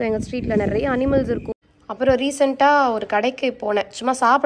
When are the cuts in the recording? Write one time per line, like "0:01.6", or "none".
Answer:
0:01.5